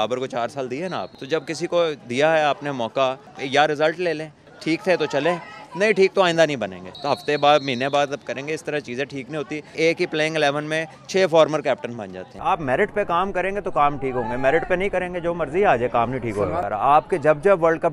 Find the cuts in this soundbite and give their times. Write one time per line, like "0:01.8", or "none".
0:01.1
0:03.4
0:04.4
0:06.9
0:09.8
0:12.2
0:16.6